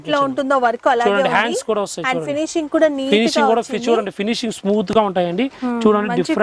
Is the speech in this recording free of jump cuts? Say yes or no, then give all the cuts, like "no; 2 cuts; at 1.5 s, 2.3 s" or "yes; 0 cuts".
yes; 0 cuts